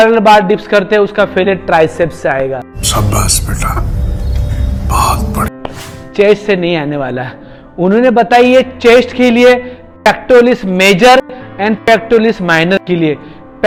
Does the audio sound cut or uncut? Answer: uncut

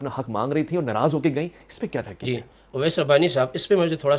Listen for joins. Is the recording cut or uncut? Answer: uncut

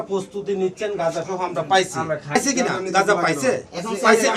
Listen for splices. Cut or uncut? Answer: cut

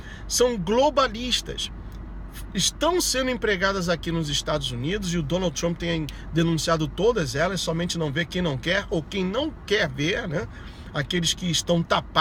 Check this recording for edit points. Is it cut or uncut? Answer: uncut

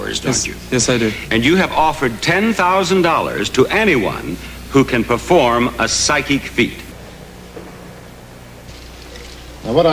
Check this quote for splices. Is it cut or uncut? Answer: cut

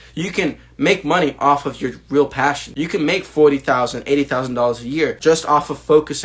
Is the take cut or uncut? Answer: cut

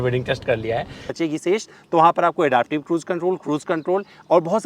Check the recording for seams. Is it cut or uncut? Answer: cut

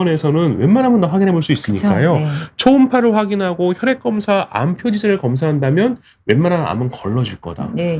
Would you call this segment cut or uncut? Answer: uncut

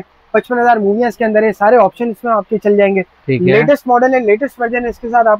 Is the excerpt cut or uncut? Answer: uncut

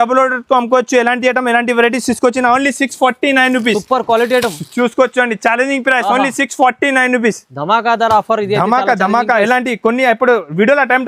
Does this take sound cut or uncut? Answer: uncut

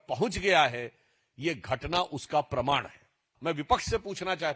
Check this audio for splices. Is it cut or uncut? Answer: cut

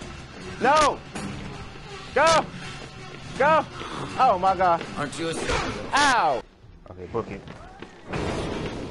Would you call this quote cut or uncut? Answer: cut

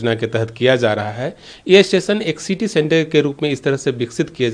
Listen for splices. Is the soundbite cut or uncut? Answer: uncut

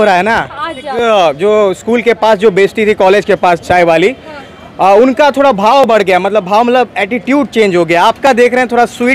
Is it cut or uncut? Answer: cut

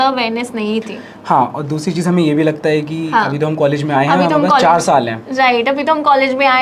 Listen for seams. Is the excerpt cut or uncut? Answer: uncut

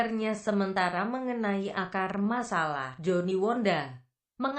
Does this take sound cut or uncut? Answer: cut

